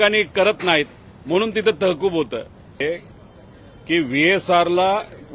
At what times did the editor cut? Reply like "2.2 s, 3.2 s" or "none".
2.8 s